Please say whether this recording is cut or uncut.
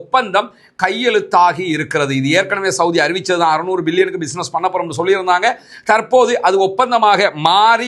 uncut